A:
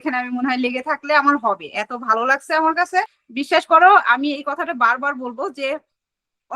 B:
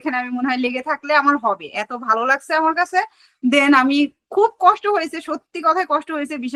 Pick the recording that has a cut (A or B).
A